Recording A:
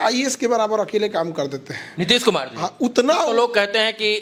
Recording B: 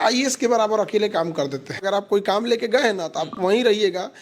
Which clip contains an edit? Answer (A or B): B